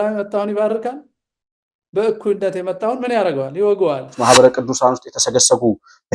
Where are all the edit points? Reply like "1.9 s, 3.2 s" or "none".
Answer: 4.2 s

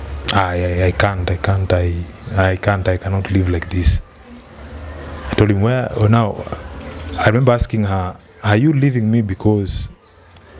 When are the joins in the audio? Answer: none

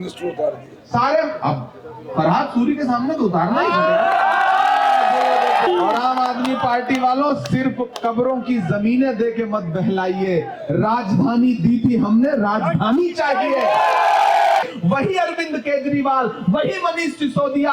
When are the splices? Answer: 5.7 s, 14.6 s

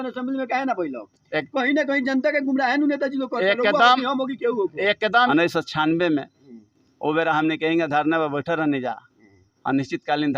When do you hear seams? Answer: 5.3 s

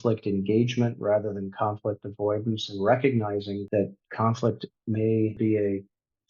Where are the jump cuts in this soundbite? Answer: 3.6 s, 5.3 s

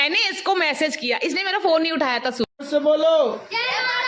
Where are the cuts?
2.5 s

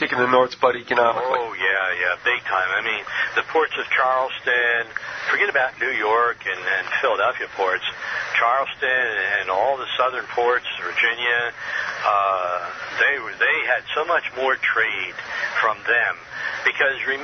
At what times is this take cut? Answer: none

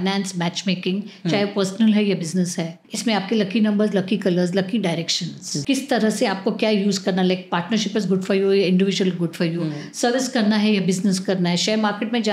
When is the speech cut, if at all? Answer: 2.8 s, 5.6 s

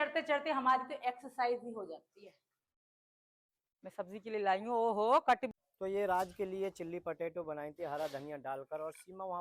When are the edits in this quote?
5.5 s

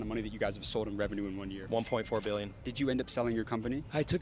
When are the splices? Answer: 1.6 s, 2.6 s

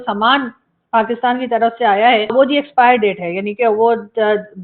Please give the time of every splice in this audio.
2.3 s

